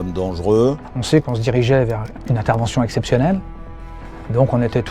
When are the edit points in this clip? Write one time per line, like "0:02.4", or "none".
0:01.2
0:02.1

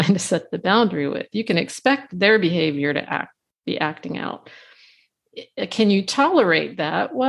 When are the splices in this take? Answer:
none

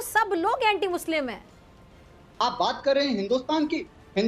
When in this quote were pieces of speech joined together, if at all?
0:02.2

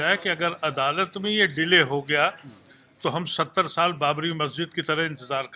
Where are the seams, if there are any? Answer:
none

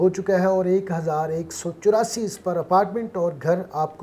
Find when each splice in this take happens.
none

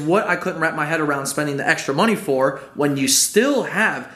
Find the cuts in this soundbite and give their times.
none

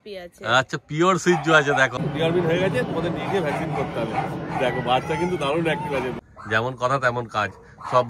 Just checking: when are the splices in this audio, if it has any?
0:02.0
0:06.2

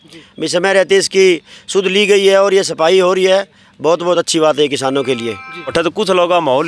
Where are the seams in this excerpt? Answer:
0:05.7

